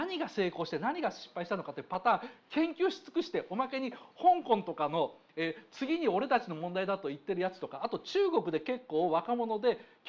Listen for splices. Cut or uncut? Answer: uncut